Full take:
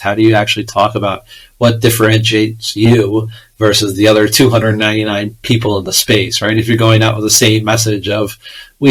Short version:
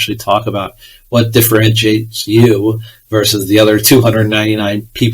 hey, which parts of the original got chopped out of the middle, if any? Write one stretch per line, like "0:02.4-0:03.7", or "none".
none